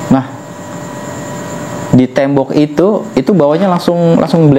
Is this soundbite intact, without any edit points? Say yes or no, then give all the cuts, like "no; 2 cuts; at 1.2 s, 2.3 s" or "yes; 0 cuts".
yes; 0 cuts